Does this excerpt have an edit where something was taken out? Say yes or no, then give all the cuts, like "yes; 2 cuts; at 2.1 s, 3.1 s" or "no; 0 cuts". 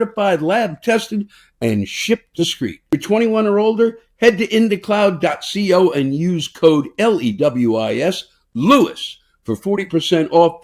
yes; 1 cut; at 2.9 s